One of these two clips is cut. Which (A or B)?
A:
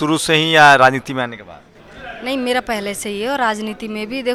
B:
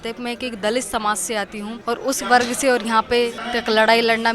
B